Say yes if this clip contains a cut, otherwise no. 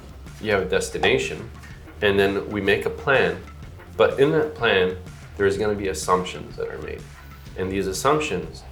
no